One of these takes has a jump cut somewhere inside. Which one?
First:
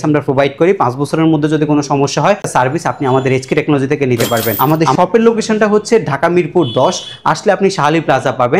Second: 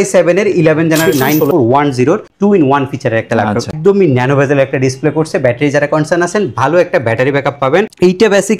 second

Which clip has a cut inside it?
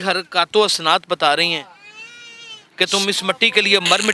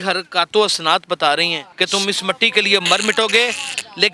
second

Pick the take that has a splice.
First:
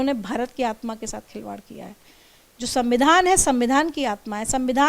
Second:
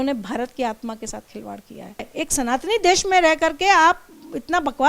second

